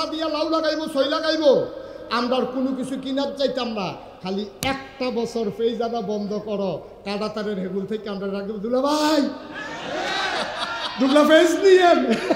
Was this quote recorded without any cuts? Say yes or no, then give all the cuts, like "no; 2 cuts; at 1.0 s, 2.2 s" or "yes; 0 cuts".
yes; 0 cuts